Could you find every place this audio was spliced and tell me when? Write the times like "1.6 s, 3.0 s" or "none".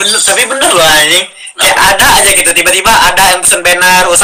none